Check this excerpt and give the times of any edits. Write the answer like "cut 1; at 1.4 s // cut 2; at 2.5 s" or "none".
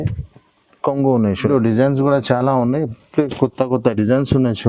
cut 1; at 1.5 s